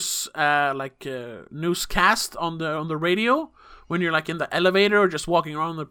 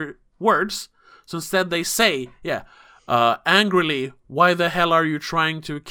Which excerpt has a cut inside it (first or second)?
first